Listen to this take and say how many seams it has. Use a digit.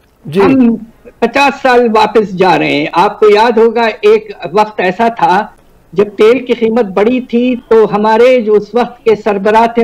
0